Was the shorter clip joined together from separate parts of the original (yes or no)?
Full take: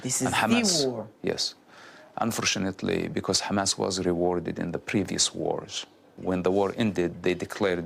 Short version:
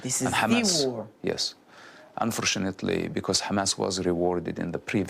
no